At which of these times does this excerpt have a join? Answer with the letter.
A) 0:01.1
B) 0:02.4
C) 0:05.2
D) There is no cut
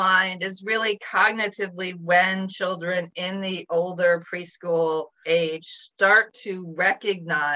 C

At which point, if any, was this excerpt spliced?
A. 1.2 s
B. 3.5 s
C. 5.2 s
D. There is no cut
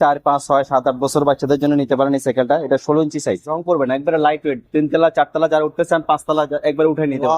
B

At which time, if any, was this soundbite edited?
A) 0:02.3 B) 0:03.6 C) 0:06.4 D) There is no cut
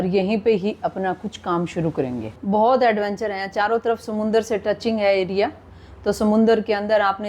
A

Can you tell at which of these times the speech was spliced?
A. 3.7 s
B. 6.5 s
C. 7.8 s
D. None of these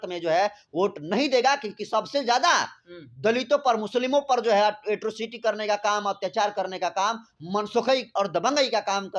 D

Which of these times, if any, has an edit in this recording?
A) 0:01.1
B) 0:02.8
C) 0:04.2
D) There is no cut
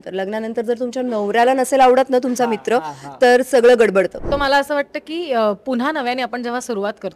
C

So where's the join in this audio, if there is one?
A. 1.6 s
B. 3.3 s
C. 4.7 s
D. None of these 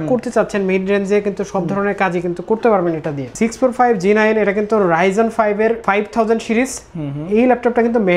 B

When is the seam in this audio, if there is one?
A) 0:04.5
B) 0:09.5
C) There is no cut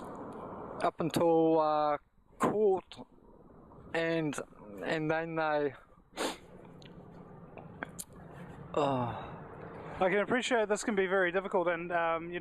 C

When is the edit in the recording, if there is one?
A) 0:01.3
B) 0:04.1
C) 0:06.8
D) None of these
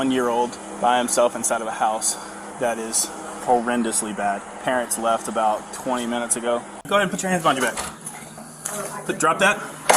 C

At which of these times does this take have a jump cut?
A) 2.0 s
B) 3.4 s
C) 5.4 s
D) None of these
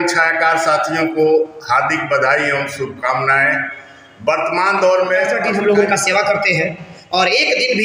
C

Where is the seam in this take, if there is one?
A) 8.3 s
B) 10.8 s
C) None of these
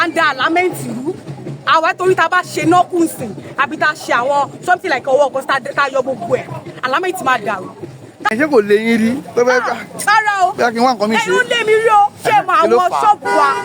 A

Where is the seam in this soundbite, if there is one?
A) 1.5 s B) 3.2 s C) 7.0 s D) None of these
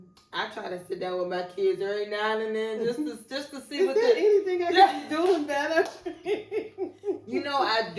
D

